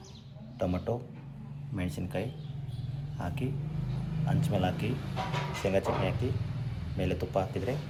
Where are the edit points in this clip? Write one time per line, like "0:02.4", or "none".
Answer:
none